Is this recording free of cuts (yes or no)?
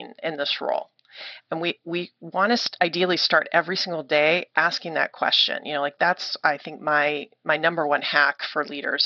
yes